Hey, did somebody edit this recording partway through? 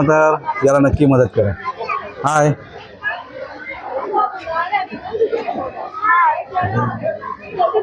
no; 0 cuts

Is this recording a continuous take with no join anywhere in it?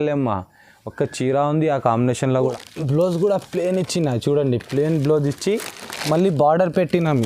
no; 1 cut; at 2.7 s

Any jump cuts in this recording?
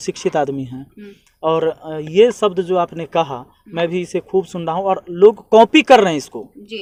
no; 0 cuts

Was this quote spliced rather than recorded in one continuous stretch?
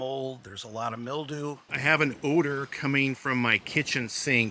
yes; 1 cut; at 1.7 s

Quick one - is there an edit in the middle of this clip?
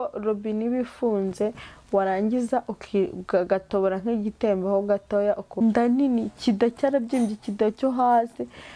yes; 1 cut; at 5.6 s

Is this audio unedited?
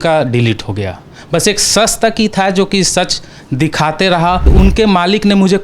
no; 1 cut; at 4.5 s

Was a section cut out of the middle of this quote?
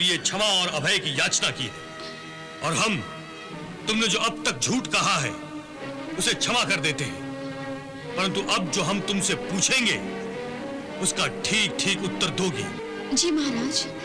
yes; 1 cut; at 12.8 s

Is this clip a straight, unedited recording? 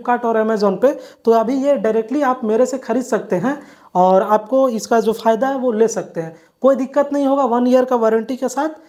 yes; 0 cuts

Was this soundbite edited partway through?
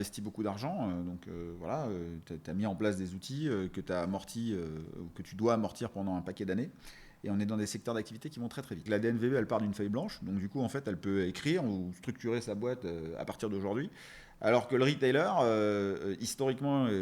yes; 1 cut; at 8.8 s

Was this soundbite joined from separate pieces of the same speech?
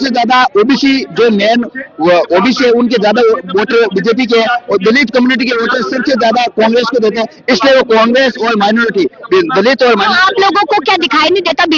no; 0 cuts

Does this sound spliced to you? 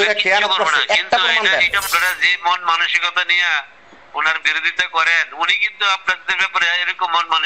yes; 1 cut; at 1.8 s

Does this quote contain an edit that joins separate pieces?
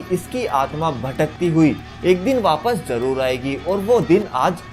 no; 0 cuts

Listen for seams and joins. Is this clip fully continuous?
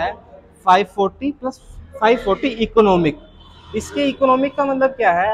yes; 0 cuts

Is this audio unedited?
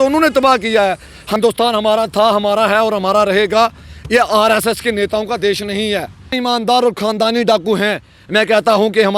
no; 2 cuts; at 1.3 s, 6.3 s

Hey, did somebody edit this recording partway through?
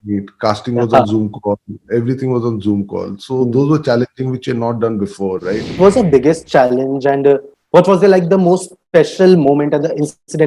yes; 1 cut; at 5.7 s

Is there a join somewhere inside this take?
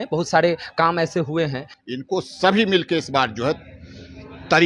yes; 1 cut; at 1.7 s

